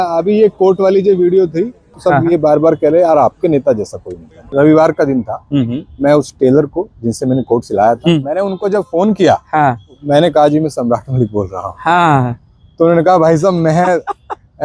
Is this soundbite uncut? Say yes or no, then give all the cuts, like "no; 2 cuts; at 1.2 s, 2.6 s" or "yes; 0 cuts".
no; 4 cuts; at 1.9 s, 4.4 s, 8.2 s, 10.0 s